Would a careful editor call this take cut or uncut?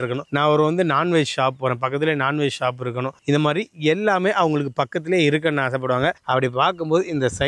uncut